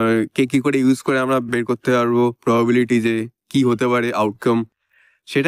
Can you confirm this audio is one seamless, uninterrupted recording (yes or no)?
yes